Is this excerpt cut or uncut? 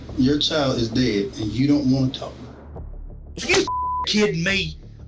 cut